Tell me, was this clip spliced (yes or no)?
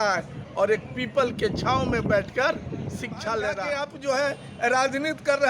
yes